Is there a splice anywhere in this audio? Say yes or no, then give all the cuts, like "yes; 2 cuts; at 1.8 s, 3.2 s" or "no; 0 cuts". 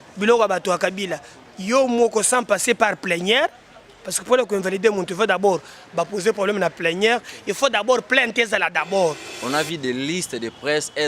yes; 1 cut; at 9.3 s